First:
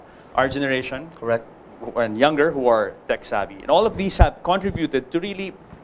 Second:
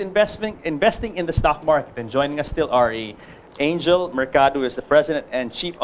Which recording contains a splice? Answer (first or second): first